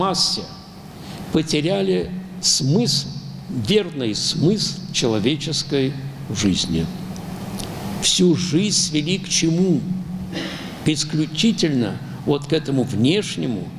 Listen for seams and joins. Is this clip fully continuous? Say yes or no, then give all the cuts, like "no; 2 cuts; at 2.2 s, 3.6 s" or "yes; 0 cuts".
yes; 0 cuts